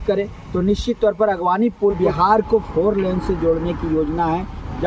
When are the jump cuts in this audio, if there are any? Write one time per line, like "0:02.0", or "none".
0:02.0